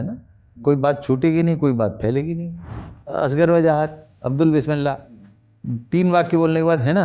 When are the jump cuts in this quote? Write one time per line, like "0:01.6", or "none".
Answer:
0:03.1